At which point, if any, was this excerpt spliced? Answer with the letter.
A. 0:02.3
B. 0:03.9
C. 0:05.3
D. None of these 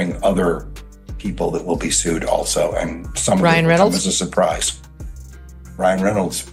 D